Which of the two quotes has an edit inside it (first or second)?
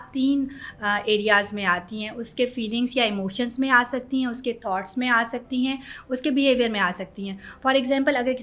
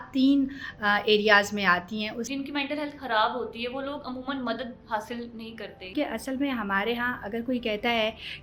second